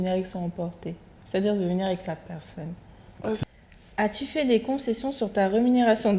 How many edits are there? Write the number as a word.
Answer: one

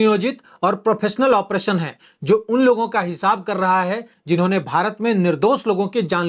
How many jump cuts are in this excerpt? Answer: zero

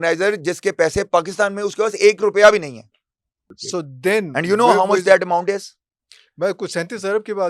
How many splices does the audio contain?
one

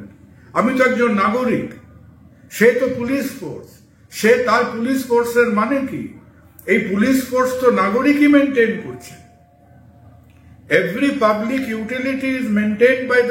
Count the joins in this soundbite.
zero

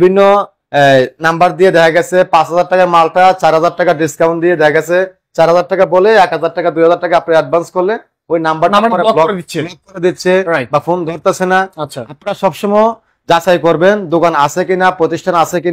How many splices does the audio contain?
zero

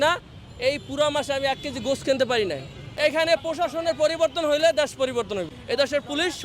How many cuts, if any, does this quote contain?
two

